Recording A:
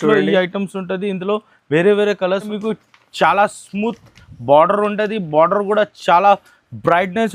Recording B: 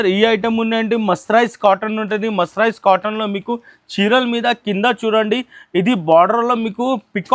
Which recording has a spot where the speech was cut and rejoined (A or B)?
A